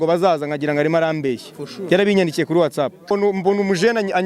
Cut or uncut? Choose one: cut